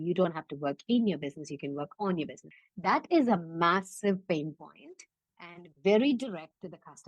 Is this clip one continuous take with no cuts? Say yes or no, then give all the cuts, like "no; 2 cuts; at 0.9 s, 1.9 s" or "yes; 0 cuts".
yes; 0 cuts